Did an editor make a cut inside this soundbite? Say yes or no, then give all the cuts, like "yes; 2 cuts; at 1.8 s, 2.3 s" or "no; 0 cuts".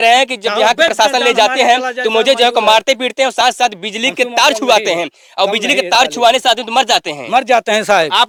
no; 0 cuts